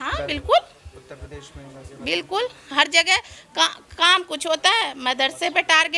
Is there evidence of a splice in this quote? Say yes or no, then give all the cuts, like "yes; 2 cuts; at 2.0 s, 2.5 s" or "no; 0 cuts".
no; 0 cuts